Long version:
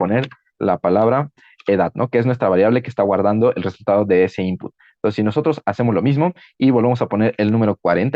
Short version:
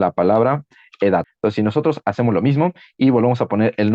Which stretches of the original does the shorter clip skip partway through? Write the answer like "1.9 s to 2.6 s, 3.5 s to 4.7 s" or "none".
2.0 s to 4.9 s